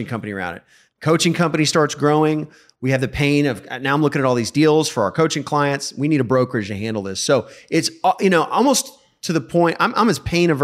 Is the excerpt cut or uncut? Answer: uncut